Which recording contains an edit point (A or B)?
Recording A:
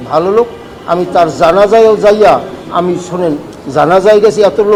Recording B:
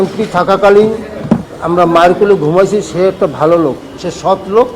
B